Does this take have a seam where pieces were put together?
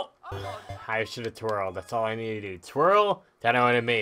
no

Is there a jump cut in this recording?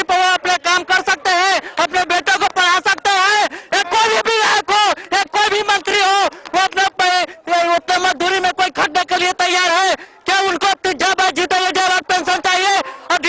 no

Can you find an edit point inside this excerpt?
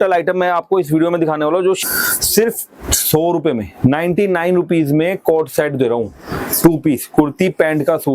yes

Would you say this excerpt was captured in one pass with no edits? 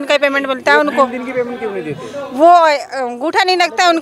yes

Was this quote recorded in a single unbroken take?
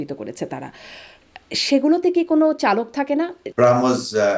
no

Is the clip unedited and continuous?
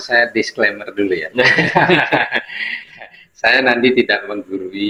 yes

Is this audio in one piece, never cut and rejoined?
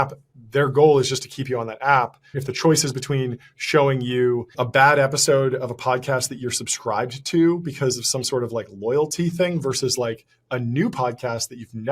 no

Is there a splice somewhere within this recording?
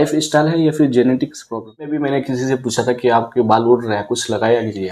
yes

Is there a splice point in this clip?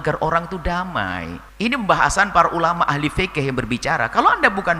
yes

